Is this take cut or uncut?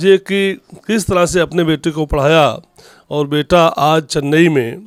uncut